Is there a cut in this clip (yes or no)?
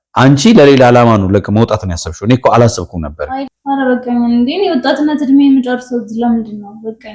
yes